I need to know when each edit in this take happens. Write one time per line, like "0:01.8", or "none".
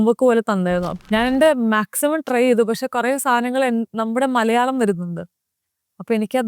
0:01.0